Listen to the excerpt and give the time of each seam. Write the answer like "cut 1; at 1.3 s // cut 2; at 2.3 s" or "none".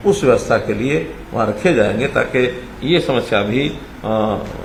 none